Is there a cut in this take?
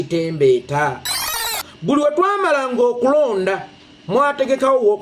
yes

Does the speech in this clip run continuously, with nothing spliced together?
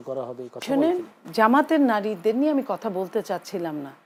yes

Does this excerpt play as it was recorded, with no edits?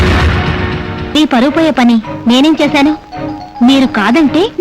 no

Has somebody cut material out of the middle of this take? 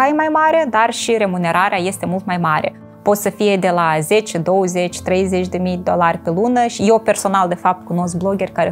no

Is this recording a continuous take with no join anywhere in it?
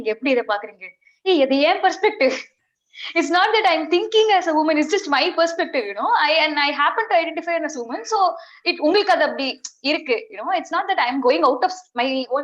yes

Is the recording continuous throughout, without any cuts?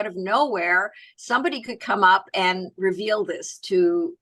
yes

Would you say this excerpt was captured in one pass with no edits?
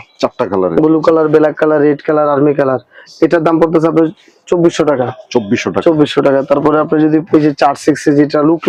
yes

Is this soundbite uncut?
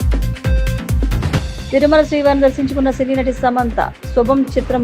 no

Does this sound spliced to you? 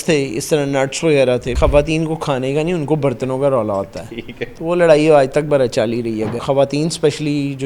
yes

